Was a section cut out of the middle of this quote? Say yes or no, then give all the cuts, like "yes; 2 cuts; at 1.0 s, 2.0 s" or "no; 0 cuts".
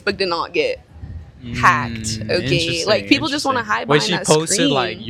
no; 0 cuts